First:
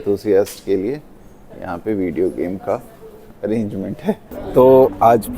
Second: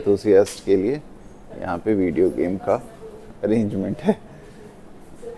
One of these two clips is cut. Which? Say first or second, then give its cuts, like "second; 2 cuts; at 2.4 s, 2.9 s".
first; 1 cut; at 4.3 s